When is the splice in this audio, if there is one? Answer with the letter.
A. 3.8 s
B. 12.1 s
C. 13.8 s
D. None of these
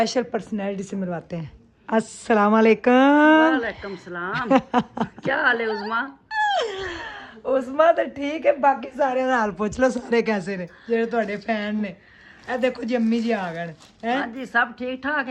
D